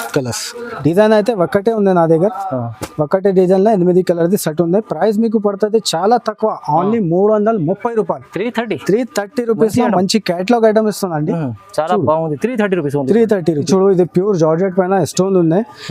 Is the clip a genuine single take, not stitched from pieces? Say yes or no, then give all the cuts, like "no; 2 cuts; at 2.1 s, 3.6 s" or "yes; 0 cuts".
yes; 0 cuts